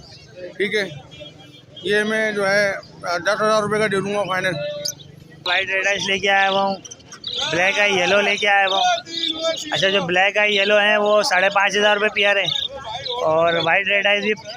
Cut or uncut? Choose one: cut